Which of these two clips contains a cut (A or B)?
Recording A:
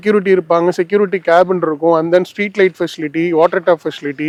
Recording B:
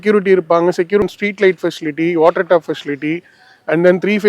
B